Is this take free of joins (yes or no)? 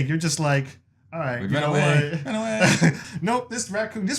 no